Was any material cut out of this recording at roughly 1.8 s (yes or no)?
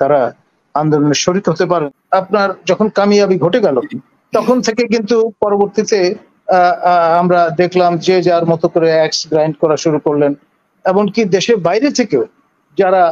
yes